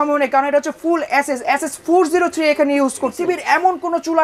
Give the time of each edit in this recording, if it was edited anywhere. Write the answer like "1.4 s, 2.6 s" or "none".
3.2 s